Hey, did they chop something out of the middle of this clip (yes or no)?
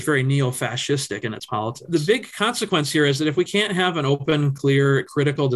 yes